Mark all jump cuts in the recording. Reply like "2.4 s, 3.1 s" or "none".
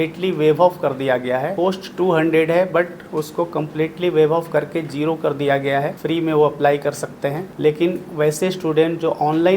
1.5 s, 6.0 s, 7.5 s